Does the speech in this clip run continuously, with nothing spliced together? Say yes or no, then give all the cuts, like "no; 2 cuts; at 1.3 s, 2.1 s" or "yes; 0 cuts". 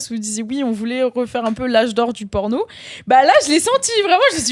yes; 0 cuts